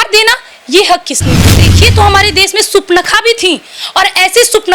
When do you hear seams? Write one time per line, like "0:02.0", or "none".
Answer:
0:01.6